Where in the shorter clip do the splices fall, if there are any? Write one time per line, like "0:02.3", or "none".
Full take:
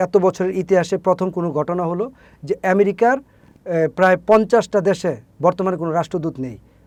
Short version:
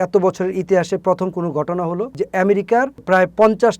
0:02.1
0:03.0